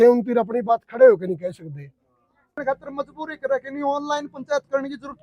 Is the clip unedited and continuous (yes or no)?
no